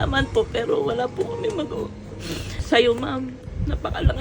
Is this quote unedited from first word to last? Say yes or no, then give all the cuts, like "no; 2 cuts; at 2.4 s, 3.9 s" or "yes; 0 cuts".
no; 1 cut; at 2.5 s